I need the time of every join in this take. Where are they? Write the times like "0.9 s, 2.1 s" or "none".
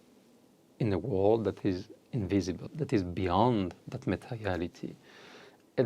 2.7 s